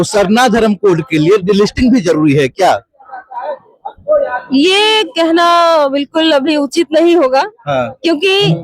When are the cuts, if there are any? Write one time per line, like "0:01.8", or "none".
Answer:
none